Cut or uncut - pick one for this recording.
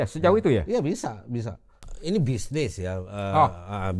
cut